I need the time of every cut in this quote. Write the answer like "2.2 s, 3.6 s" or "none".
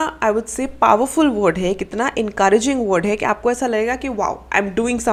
none